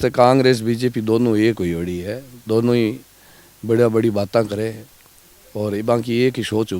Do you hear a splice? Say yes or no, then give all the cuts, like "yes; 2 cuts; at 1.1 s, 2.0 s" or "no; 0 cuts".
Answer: no; 0 cuts